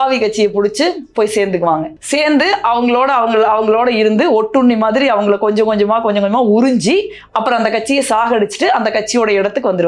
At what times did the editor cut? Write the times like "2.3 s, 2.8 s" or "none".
none